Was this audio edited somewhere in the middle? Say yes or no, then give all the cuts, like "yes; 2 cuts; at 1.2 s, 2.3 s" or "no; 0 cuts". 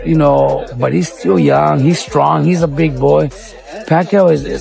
no; 0 cuts